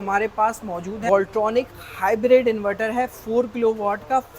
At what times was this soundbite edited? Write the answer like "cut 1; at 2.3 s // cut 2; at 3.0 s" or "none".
cut 1; at 1.0 s